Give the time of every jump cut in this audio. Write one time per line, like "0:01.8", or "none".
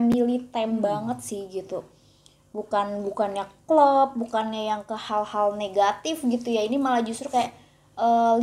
none